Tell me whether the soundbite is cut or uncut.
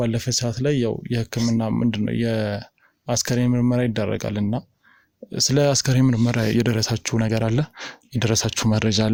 uncut